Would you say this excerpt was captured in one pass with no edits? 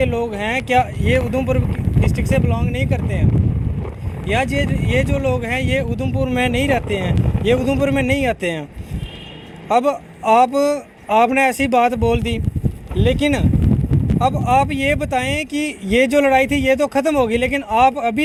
yes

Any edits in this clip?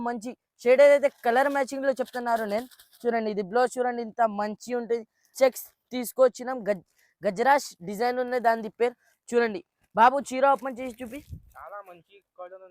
yes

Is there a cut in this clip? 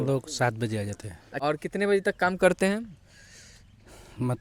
yes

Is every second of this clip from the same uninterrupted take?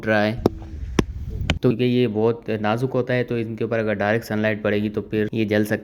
no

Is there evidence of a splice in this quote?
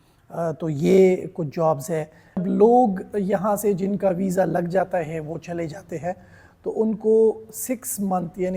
yes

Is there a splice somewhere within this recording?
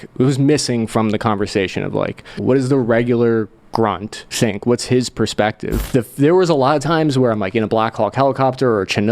yes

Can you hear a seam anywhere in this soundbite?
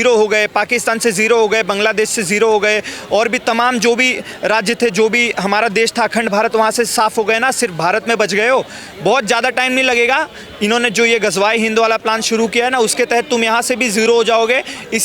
no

